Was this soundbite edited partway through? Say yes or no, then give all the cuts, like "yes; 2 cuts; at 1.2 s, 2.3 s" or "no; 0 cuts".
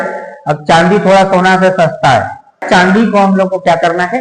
yes; 1 cut; at 2.6 s